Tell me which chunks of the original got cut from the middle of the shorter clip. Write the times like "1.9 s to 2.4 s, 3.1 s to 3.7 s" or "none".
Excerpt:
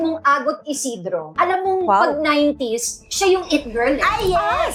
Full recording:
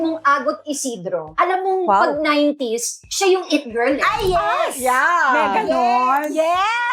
none